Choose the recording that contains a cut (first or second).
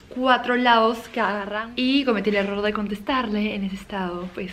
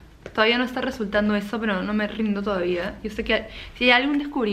first